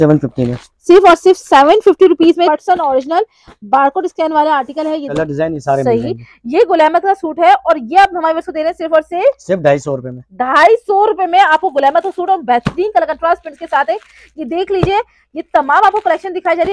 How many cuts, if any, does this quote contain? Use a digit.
2